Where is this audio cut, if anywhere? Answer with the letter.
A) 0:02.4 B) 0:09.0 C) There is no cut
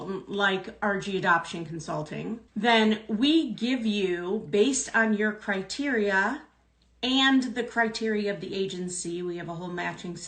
A